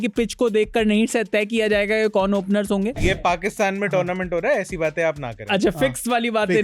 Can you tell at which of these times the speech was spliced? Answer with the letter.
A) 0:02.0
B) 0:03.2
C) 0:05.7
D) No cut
B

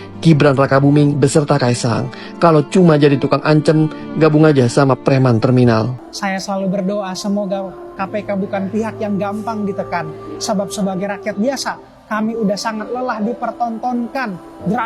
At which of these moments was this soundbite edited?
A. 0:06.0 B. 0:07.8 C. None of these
A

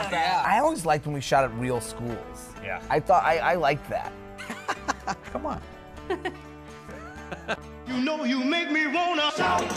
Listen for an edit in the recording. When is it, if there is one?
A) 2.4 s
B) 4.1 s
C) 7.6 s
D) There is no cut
C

